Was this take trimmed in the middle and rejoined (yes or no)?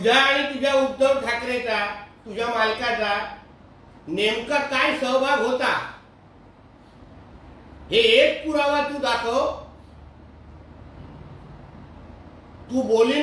no